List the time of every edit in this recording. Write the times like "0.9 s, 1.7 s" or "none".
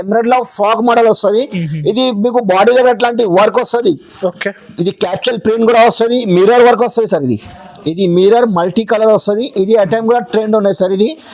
6.2 s